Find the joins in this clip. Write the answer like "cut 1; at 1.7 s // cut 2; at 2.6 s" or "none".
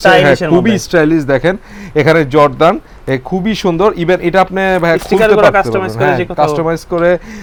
none